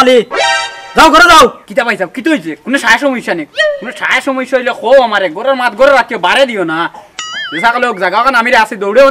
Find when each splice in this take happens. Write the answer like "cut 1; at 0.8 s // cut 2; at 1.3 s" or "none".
cut 1; at 1.6 s